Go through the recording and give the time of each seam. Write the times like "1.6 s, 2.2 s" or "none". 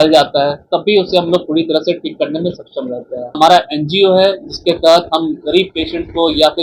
3.3 s